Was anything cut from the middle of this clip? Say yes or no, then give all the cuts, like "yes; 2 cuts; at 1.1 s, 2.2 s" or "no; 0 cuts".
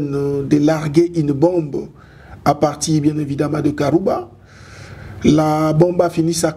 no; 0 cuts